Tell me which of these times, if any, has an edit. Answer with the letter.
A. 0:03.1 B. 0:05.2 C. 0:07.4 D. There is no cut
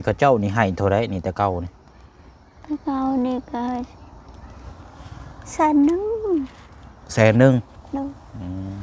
D